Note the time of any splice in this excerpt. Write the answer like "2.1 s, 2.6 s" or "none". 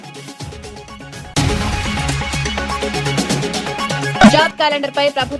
1.3 s, 4.2 s